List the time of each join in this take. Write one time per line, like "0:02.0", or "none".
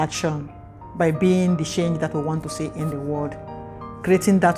none